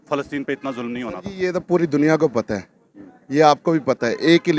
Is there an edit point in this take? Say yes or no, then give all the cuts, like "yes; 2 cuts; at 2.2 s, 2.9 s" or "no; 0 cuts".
no; 0 cuts